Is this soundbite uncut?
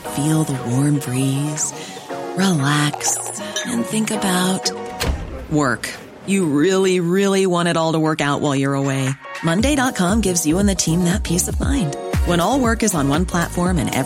yes; 0 cuts

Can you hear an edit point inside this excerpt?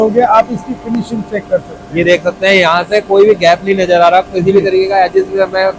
no; 0 cuts

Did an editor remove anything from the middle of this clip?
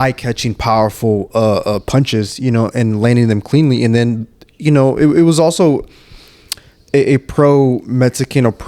no; 0 cuts

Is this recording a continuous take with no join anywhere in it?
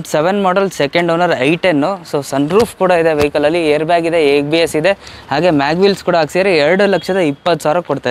yes; 0 cuts

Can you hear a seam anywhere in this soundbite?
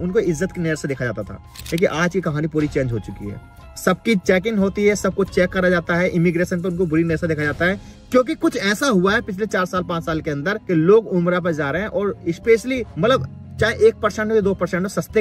no; 0 cuts

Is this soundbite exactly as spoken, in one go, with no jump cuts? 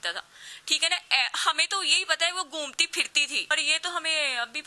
no; 1 cut; at 3.5 s

